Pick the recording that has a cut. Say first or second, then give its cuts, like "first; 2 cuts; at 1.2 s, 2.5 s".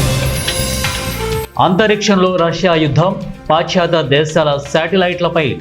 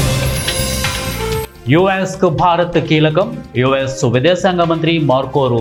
first; 1 cut; at 1.5 s